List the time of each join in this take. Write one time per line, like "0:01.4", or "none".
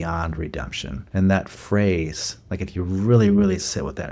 0:00.9